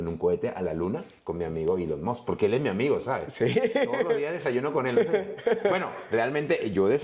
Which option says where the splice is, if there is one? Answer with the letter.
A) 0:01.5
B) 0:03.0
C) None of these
C